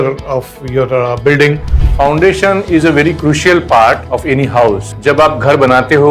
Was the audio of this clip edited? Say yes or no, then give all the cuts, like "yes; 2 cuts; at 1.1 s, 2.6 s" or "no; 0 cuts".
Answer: yes; 2 cuts; at 1.8 s, 4.6 s